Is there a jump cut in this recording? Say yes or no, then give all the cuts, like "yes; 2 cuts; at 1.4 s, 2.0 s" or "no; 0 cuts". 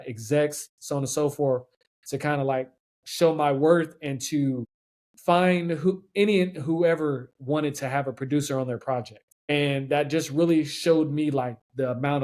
no; 0 cuts